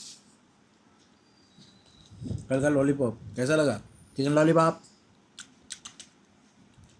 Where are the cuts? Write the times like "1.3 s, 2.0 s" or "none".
4.7 s